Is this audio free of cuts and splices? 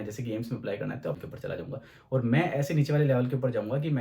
no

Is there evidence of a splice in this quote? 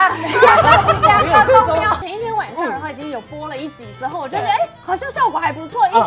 yes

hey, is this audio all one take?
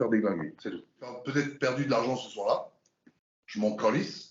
no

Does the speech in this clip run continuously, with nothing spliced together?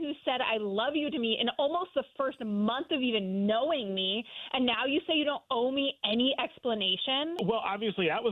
no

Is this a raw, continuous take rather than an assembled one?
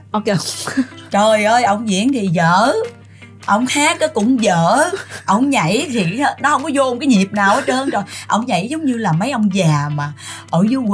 yes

